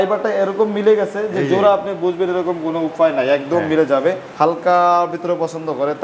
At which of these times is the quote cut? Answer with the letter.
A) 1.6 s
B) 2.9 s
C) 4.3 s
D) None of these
C